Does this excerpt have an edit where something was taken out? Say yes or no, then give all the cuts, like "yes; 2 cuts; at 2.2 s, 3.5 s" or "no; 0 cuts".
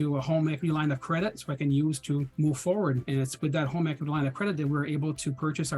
yes; 2 cuts; at 2.3 s, 3.0 s